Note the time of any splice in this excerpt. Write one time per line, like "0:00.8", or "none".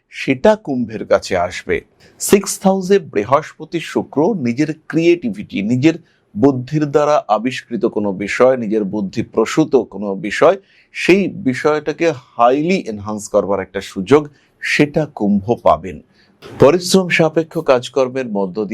0:02.0
0:16.4